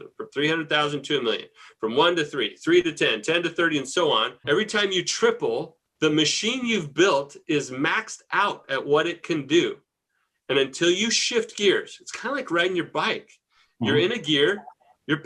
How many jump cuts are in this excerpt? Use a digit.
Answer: 1